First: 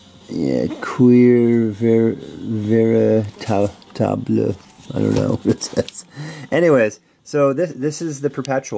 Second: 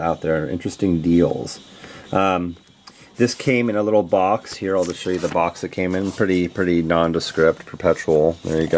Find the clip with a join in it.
second; 1 cut; at 2.2 s

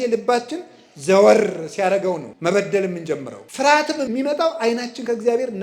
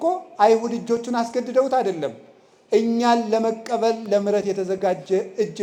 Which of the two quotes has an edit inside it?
first; 3 cuts; at 2.3 s, 3.4 s, 4.1 s

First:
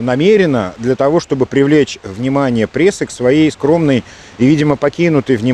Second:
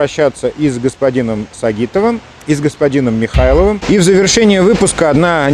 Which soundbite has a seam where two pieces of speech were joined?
second; 1 cut; at 3.8 s

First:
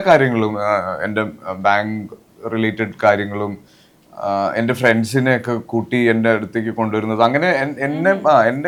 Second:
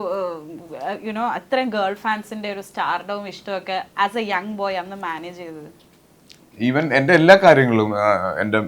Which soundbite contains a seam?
second; 1 cut; at 6.3 s

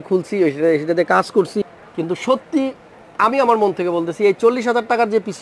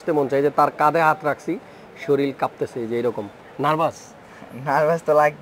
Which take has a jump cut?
first; 1 cut; at 1.6 s

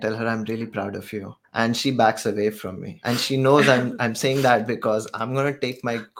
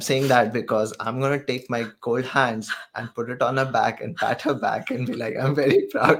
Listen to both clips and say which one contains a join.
first; 2 cuts; at 1.4 s, 3.0 s

